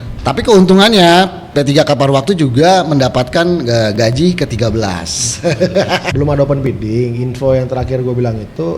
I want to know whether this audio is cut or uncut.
cut